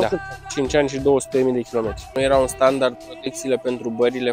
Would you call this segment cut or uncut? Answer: cut